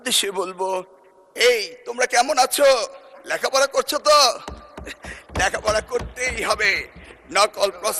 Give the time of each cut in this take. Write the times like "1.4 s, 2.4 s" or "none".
none